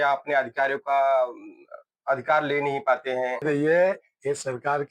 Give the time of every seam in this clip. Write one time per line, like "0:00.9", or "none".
0:03.4